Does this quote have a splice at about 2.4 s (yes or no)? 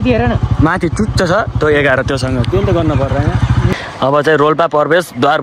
no